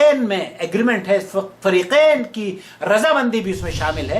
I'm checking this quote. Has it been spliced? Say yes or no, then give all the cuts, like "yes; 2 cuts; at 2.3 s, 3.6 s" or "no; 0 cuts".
no; 0 cuts